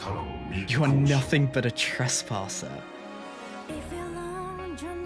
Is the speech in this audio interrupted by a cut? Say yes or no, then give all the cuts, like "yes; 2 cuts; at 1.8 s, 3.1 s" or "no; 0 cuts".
no; 0 cuts